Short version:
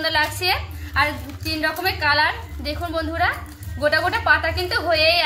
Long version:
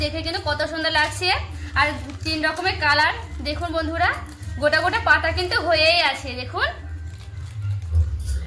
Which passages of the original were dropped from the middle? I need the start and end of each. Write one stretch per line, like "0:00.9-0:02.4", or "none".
none